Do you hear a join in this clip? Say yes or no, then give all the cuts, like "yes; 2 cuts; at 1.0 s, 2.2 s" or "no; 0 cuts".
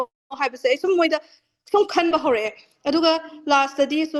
no; 0 cuts